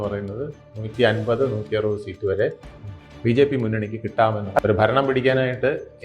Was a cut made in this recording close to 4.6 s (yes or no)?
yes